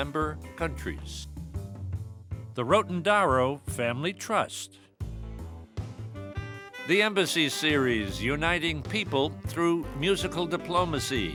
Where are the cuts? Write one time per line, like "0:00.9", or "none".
none